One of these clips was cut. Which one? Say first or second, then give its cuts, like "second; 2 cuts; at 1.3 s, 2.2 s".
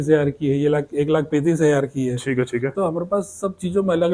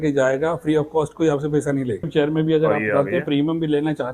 second; 1 cut; at 2.1 s